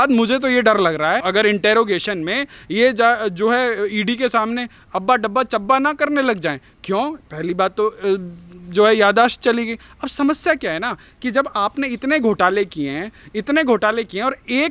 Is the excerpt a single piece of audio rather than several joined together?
yes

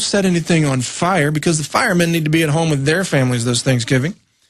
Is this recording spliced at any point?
yes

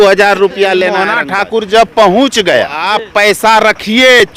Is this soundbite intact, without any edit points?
no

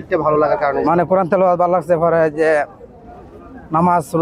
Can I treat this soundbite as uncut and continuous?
yes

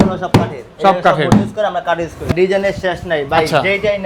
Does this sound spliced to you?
yes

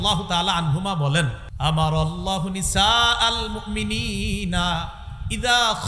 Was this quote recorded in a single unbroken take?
no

